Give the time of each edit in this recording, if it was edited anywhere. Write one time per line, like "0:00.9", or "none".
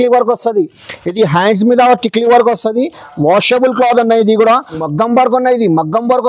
0:04.8